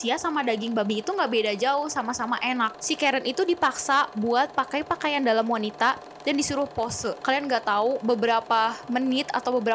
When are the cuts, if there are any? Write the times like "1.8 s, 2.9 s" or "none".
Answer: 2.8 s, 7.2 s